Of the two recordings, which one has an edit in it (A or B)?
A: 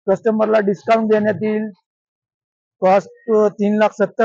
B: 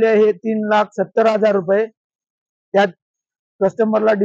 A